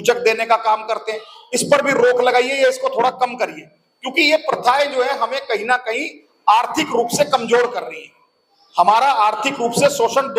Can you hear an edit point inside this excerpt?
no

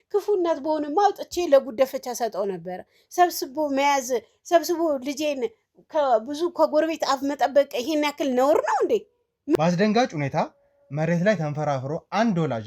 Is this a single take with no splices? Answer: no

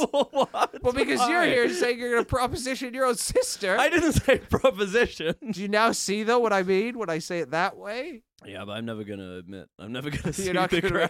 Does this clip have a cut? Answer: yes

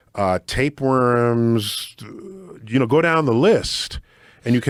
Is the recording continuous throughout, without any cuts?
yes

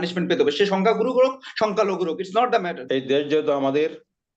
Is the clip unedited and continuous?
no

